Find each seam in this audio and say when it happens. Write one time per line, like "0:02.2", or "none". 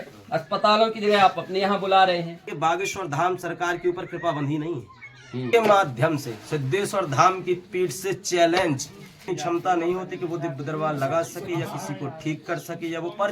0:02.4
0:05.5
0:09.3